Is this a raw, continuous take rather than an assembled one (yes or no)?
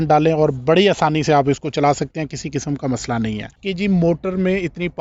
no